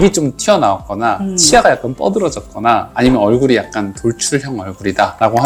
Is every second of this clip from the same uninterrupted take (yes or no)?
yes